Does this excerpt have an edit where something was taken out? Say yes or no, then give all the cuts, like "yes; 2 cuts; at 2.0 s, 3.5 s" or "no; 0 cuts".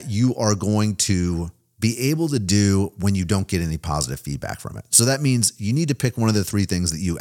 yes; 1 cut; at 1.6 s